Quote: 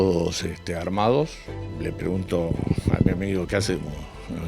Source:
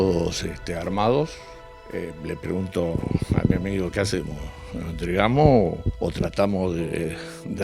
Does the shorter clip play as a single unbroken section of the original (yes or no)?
no